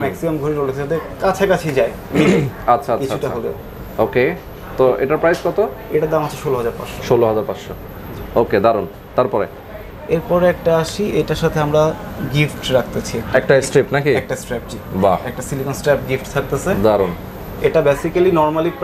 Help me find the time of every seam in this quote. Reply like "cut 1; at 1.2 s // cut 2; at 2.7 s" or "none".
none